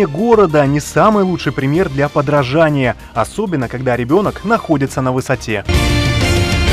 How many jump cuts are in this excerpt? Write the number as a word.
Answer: one